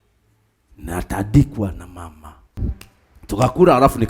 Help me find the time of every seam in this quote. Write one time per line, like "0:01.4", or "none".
0:02.6

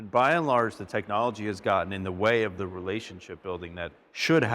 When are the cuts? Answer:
none

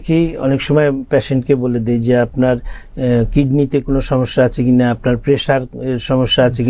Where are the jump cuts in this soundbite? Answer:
none

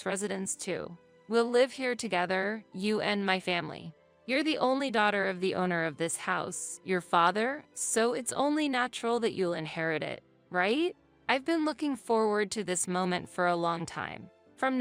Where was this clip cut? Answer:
none

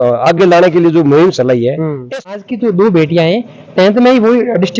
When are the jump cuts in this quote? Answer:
0:02.4

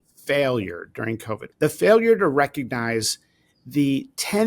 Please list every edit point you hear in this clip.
0:01.4

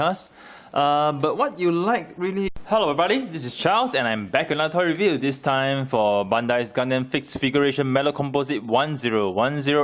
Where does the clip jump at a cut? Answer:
none

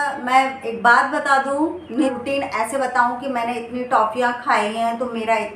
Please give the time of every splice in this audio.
0:02.1

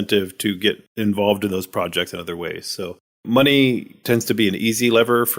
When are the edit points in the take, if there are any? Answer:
0:00.9
0:03.2

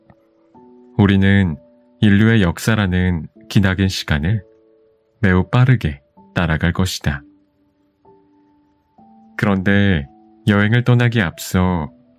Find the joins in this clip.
none

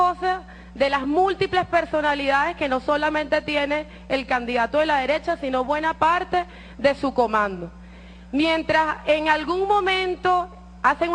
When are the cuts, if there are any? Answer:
none

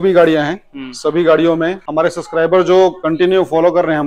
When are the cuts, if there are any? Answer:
0:01.8
0:03.0

